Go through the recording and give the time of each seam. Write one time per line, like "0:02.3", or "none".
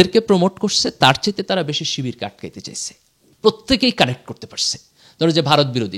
0:03.3